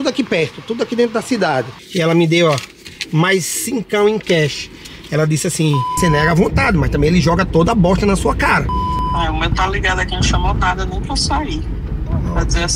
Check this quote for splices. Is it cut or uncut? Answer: cut